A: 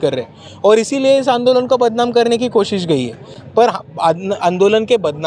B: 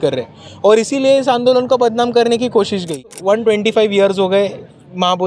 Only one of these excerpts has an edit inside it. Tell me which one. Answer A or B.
B